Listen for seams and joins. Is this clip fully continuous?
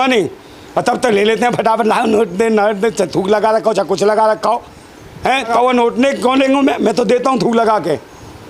yes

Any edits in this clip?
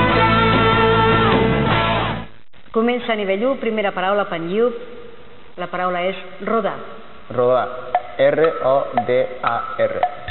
no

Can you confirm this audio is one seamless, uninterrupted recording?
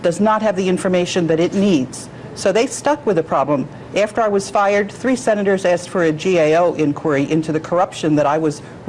yes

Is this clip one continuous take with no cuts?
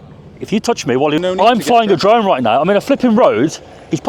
no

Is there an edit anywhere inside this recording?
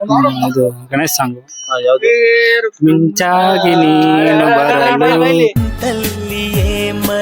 yes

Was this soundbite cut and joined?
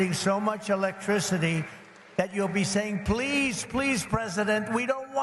no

